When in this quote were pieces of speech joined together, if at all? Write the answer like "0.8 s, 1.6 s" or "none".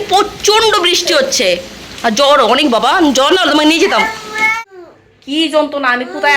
4.5 s